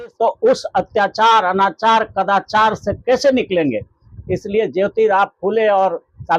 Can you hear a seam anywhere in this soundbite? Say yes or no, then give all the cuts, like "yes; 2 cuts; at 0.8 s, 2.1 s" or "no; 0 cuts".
no; 0 cuts